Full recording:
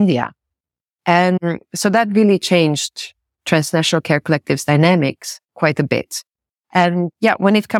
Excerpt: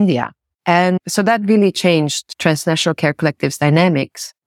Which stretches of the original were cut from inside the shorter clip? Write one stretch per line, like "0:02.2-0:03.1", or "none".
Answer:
0:00.9-0:01.6
0:02.9-0:03.3